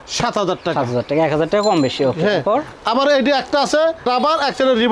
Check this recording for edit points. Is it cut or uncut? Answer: uncut